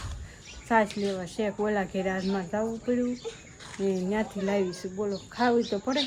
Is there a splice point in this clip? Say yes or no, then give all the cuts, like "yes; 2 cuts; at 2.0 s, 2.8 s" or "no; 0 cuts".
no; 0 cuts